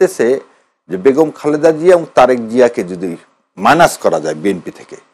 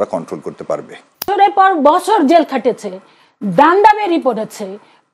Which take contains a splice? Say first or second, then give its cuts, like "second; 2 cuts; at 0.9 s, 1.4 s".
second; 1 cut; at 1.3 s